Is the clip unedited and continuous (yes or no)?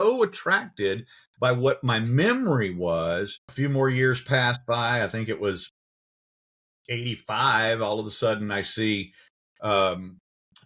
no